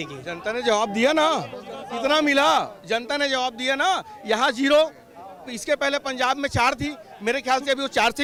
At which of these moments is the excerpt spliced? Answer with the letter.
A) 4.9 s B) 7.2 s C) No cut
C